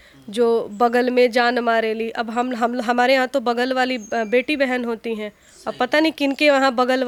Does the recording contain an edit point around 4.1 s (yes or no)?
no